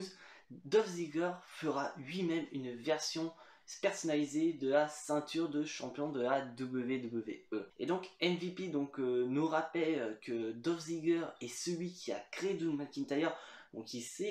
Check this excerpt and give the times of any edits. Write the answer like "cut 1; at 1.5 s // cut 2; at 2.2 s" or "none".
cut 1; at 7.7 s